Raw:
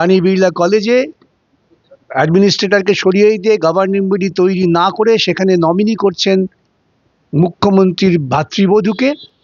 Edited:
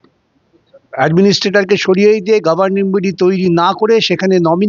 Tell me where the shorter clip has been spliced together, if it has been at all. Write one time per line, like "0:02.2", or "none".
none